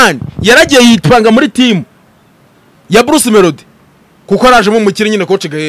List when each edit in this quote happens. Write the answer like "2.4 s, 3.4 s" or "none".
none